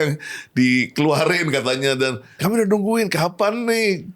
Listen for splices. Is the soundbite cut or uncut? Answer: cut